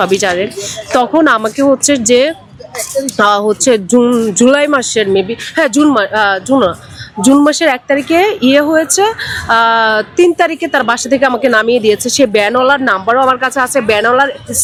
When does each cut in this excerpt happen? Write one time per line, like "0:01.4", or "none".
none